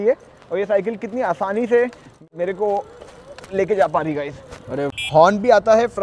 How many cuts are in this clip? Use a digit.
2